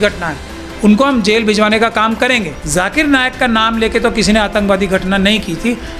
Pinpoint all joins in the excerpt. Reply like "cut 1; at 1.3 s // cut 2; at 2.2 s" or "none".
cut 1; at 2.5 s

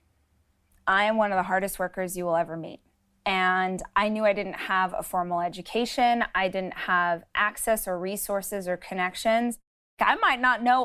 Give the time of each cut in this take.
cut 1; at 9.9 s

